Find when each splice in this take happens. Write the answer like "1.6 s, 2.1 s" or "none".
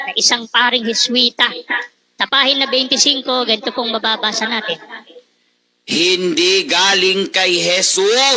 none